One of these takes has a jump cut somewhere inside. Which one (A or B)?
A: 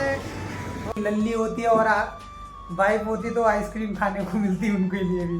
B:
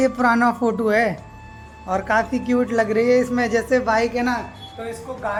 A